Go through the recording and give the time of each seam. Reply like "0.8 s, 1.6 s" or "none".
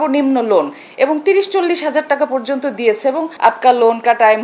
3.3 s